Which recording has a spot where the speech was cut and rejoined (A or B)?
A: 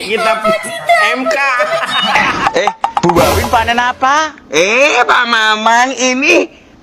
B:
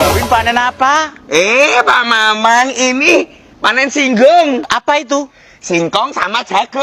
A